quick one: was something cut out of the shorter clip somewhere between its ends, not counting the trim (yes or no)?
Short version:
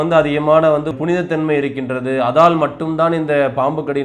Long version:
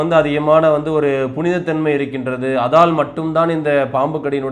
yes